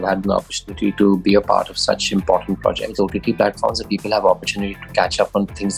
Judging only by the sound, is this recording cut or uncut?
cut